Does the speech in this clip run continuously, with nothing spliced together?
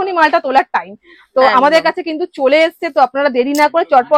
yes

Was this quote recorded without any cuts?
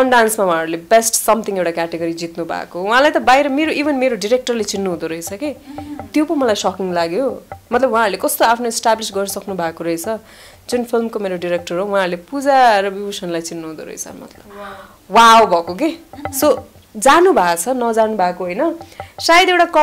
yes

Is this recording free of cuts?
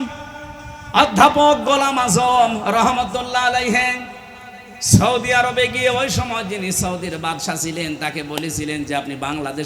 yes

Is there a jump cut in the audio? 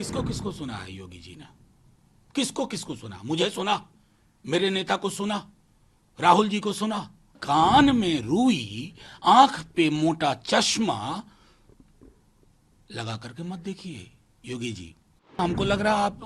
yes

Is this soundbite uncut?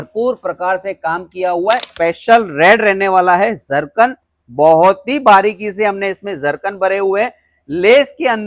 no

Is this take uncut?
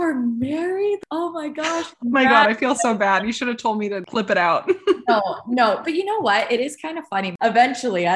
no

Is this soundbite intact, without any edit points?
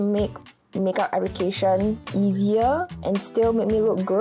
no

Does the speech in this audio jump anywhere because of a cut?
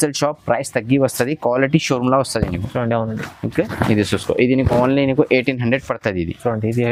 no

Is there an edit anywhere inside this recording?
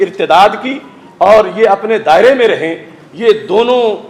no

